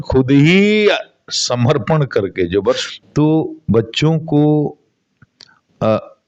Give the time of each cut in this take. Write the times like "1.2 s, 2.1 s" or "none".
2.8 s